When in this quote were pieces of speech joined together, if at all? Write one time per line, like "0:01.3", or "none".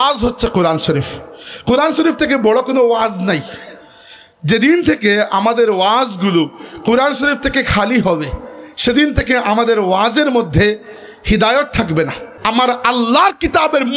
0:12.3

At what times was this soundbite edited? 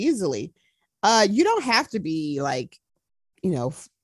none

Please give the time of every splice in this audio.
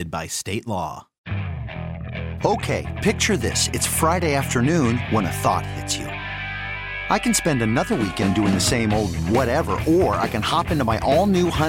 0:01.1

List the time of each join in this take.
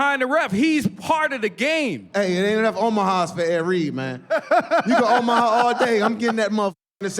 0:02.1

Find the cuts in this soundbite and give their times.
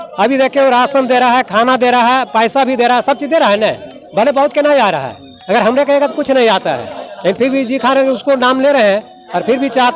none

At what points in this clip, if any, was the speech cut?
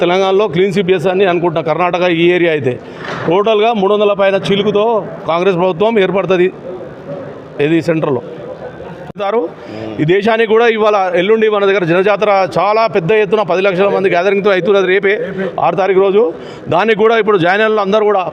0:09.1

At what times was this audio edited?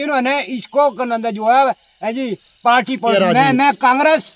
0:03.1

